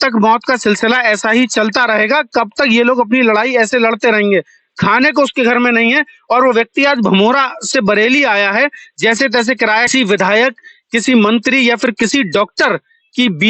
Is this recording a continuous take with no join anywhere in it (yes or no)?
no